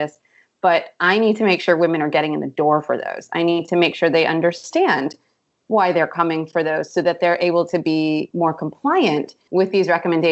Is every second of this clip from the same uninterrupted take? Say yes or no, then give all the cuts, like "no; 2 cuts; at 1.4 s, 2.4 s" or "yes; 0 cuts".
no; 2 cuts; at 8.3 s, 9.4 s